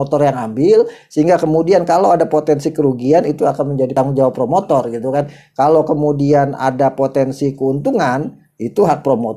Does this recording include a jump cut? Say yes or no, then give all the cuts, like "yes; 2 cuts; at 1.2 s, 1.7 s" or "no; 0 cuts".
yes; 1 cut; at 3.9 s